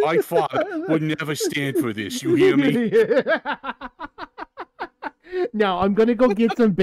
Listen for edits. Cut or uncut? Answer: uncut